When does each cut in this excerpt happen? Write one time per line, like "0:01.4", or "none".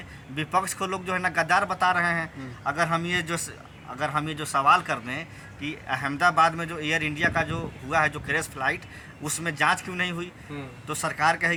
none